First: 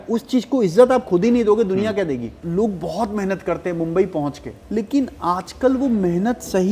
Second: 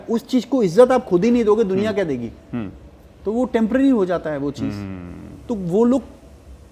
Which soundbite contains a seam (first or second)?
first